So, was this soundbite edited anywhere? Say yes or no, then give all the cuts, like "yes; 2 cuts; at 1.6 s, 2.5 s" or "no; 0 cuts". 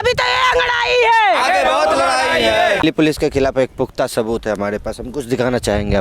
yes; 1 cut; at 2.8 s